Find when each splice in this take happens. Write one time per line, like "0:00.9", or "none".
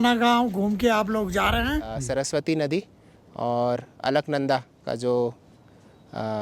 0:02.0